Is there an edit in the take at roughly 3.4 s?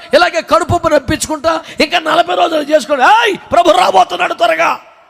no; 1 cut; at 1.6 s

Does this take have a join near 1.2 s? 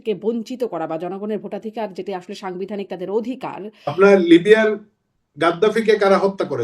no; 1 cut; at 3.8 s

